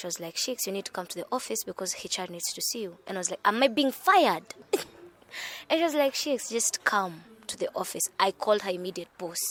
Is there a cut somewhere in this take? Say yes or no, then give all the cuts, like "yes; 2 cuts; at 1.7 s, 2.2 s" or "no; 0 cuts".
no; 0 cuts